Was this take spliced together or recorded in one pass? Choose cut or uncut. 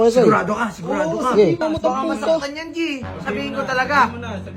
cut